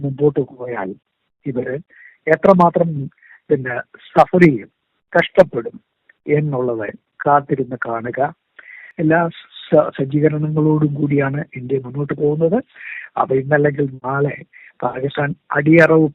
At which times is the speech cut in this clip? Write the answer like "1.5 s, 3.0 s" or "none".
8.9 s

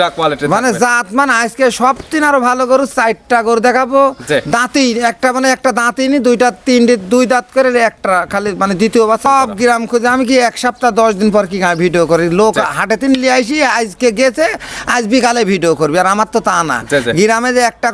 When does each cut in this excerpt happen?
9.3 s

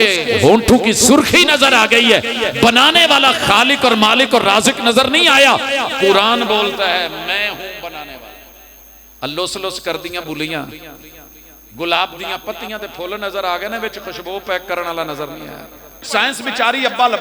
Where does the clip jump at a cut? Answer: 16.0 s

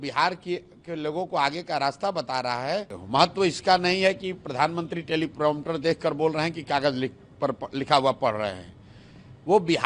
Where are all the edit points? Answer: 3.0 s

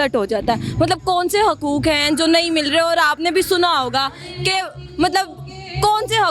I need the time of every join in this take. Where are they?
none

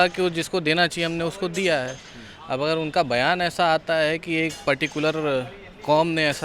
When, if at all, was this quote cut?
none

